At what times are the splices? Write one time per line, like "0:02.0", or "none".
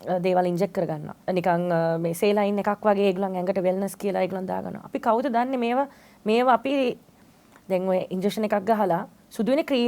0:01.1

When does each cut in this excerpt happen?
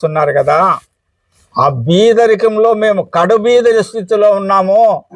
none

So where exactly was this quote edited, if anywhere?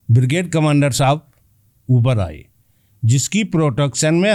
none

